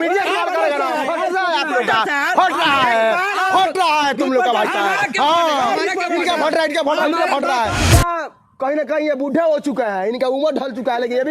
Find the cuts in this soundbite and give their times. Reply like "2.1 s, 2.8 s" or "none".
7.8 s